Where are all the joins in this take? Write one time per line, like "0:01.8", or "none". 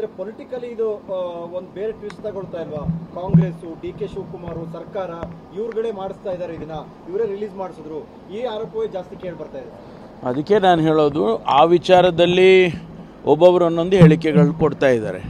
none